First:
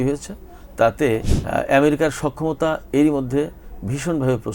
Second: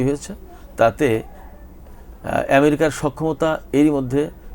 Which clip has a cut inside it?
first; 1 cut; at 1.3 s

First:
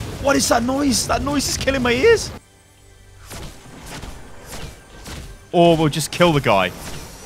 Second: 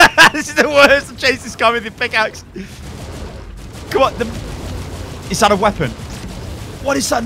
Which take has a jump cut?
first; 1 cut; at 2.4 s

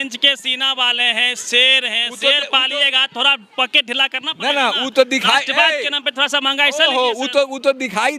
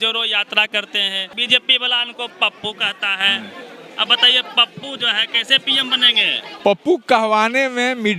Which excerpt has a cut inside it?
second; 2 cuts; at 1.3 s, 6.5 s

